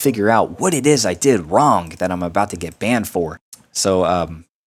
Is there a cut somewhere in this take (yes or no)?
no